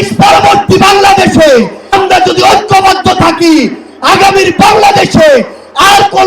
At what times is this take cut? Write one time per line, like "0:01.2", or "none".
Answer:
0:01.8